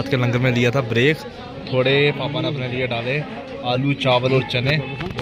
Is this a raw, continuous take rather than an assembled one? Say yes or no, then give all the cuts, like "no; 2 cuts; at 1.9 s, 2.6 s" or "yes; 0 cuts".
yes; 0 cuts